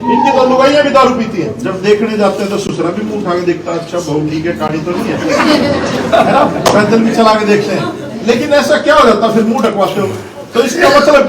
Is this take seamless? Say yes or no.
no